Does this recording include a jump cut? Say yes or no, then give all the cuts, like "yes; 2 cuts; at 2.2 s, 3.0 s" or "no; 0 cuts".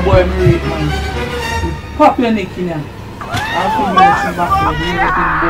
no; 0 cuts